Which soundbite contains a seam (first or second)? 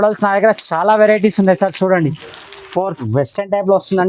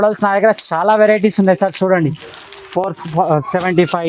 first